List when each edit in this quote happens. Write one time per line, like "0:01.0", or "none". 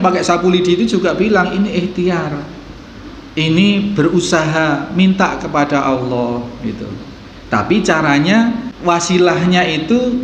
0:08.7